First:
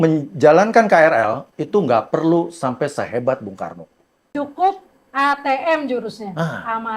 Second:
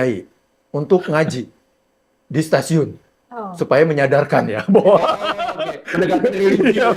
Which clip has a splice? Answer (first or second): first